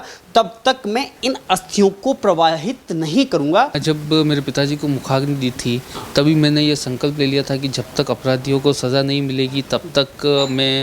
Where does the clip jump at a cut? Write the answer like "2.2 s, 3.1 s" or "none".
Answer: 3.7 s